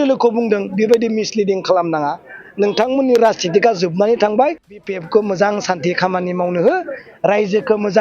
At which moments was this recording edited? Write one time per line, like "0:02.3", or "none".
0:04.9